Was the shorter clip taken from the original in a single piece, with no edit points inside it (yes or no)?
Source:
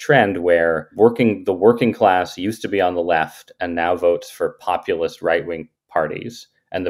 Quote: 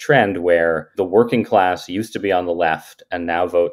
no